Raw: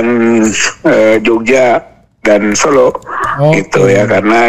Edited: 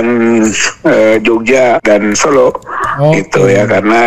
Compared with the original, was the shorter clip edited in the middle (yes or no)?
yes